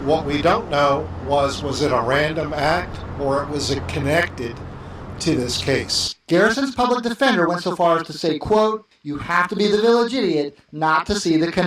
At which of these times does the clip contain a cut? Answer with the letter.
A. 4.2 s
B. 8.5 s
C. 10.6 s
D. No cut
C